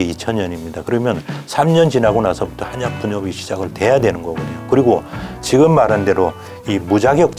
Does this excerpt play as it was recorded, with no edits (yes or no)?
yes